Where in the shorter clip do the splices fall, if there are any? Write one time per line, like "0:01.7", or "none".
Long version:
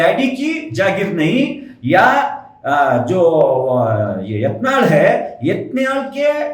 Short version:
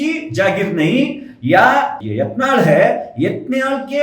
0:02.0